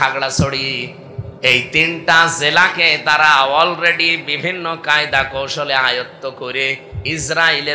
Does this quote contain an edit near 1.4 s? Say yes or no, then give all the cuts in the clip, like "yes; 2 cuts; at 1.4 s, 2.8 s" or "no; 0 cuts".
no; 0 cuts